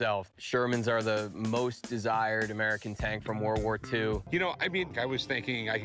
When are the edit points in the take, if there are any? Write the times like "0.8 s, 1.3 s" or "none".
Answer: 4.5 s